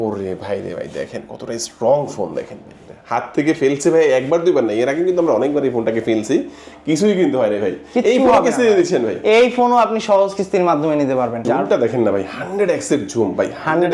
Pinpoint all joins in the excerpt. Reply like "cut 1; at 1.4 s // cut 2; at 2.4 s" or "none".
cut 1; at 11.4 s